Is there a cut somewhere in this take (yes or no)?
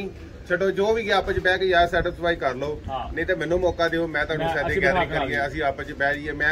no